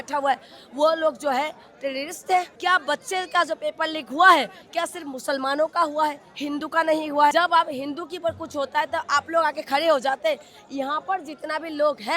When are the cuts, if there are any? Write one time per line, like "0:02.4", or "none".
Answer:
0:02.5
0:07.3